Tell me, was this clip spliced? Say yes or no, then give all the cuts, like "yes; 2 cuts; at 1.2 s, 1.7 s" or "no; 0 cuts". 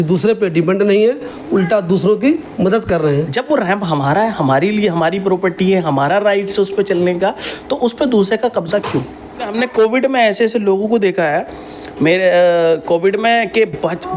yes; 2 cuts; at 3.1 s, 9.5 s